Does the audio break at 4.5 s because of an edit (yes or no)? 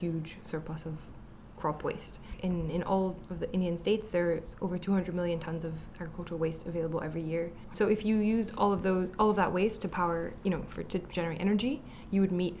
no